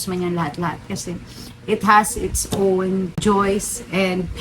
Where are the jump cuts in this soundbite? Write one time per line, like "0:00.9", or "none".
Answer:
0:03.2